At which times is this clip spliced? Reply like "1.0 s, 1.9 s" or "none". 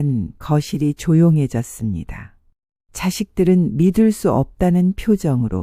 none